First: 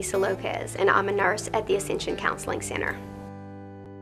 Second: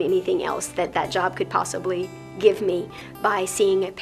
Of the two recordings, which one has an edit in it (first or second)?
first